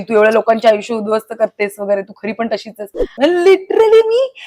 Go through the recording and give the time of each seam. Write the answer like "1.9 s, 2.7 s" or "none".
3.1 s